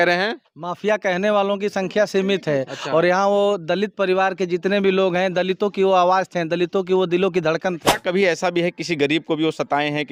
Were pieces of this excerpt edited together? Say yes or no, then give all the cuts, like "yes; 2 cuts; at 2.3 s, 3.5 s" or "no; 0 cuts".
no; 0 cuts